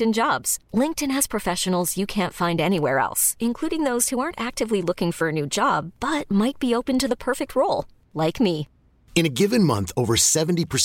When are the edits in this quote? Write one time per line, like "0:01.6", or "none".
none